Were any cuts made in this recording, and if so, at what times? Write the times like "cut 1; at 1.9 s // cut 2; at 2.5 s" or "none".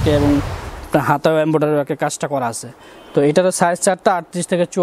none